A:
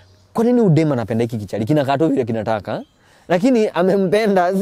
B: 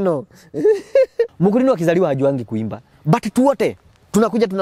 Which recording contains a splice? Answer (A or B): B